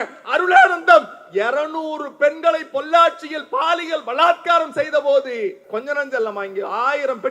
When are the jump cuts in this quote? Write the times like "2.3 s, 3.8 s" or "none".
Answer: 5.6 s

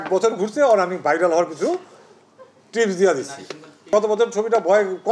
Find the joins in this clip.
3.9 s

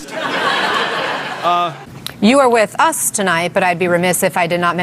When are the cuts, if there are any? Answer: 1.9 s

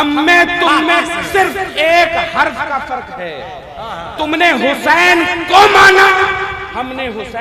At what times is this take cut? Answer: none

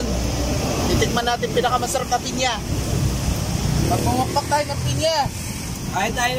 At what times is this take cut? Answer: none

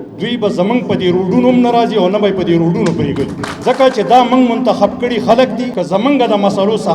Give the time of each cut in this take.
3.5 s, 5.7 s

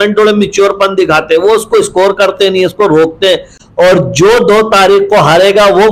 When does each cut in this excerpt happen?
3.6 s

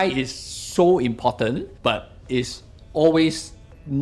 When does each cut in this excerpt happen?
1.8 s

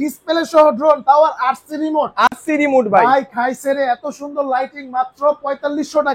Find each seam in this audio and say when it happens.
none

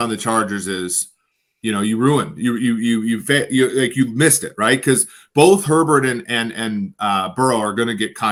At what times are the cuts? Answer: none

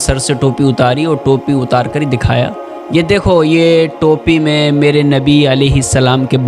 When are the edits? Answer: none

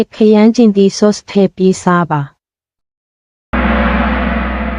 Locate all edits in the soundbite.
3.6 s

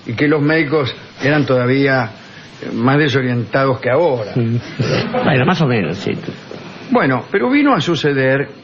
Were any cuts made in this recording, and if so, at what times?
5.4 s

